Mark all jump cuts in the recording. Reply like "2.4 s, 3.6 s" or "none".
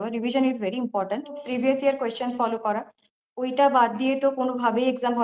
1.4 s